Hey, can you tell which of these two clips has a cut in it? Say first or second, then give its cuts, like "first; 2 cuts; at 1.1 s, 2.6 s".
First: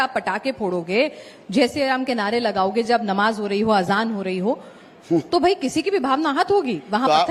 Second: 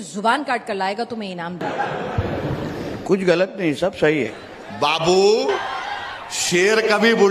second; 3 cuts; at 1.6 s, 4.4 s, 5.7 s